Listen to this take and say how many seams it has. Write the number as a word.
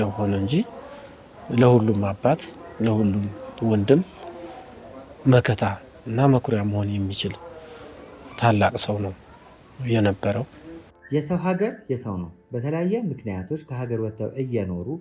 one